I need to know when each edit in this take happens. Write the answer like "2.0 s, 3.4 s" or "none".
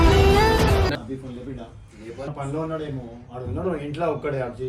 0.9 s, 2.3 s